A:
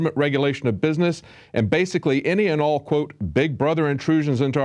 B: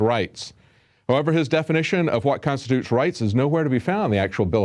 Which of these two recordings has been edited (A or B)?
A